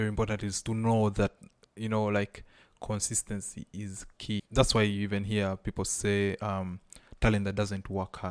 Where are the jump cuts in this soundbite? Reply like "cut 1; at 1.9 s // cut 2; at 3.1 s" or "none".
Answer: cut 1; at 4.5 s